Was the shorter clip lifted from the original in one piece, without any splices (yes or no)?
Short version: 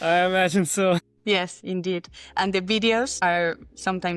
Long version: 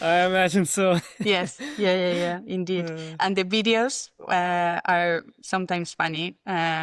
no